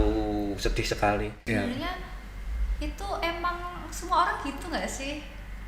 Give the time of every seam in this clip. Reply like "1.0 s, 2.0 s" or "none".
1.4 s